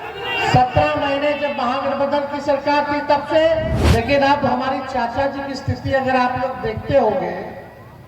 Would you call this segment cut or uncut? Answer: cut